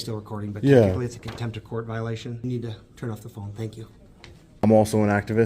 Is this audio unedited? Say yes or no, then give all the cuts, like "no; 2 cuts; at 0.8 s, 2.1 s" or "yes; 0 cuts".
no; 2 cuts; at 2.4 s, 4.6 s